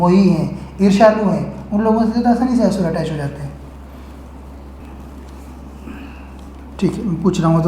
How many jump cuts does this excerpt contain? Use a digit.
1